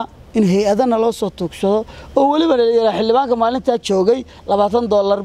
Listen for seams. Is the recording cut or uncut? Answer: uncut